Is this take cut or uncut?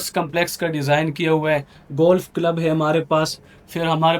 uncut